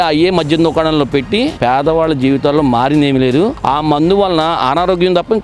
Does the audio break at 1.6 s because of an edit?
yes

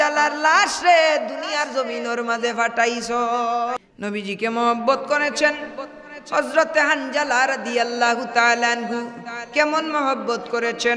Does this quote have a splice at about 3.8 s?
yes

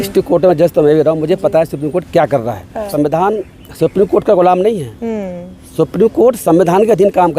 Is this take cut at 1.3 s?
no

